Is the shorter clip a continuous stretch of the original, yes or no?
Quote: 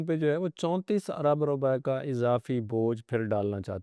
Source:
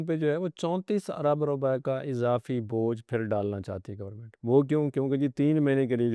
yes